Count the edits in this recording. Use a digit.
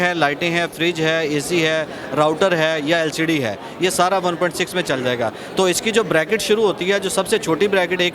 0